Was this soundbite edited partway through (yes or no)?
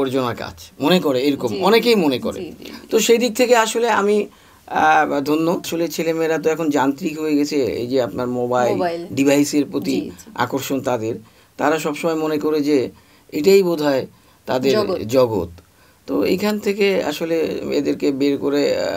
yes